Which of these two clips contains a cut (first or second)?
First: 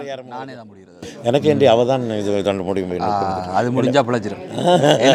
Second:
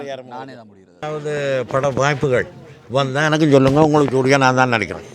second